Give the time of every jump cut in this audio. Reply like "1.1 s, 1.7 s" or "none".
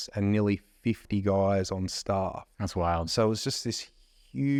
none